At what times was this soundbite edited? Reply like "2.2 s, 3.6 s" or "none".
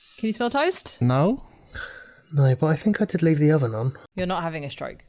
4.0 s

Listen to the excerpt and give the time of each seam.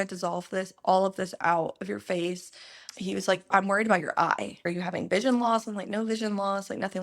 3.5 s, 4.7 s

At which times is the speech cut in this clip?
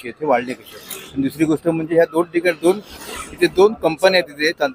none

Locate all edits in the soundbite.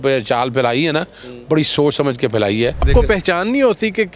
2.9 s

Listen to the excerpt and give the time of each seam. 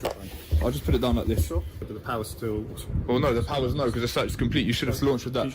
1.7 s

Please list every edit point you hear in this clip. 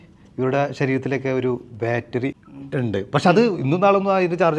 2.3 s

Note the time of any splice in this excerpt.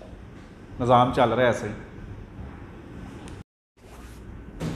3.8 s

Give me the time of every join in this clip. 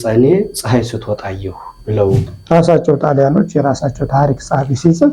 2.3 s

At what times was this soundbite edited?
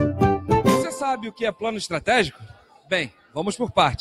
1.0 s

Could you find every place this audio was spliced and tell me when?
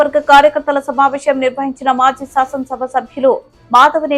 none

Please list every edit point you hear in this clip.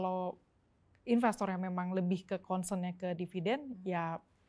none

